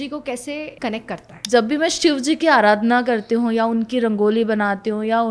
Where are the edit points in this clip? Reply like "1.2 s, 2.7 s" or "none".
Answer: 1.0 s